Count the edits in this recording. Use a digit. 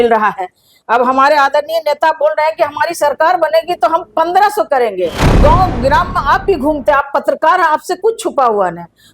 1